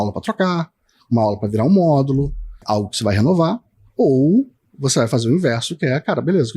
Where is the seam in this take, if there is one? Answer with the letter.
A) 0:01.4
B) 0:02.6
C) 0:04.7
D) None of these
B